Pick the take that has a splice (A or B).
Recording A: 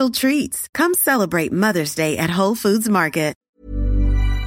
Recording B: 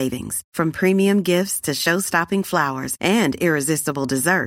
A